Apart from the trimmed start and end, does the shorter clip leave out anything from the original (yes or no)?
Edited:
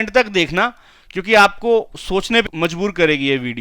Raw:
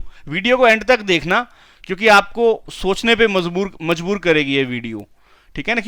yes